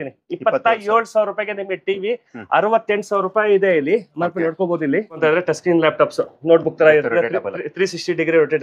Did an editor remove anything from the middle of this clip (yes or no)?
yes